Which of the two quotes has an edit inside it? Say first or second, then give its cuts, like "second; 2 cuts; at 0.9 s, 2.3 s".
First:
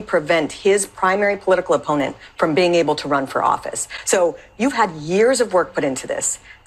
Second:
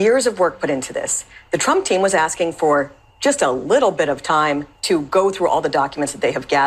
first; 1 cut; at 3.9 s